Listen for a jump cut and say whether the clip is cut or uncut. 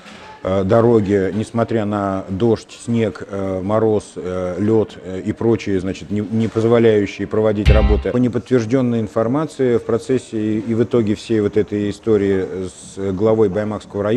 cut